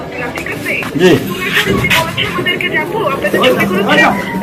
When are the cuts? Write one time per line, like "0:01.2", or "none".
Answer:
none